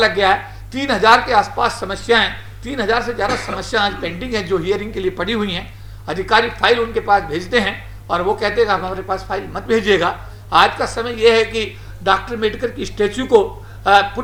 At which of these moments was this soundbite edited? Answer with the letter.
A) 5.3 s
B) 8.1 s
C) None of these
C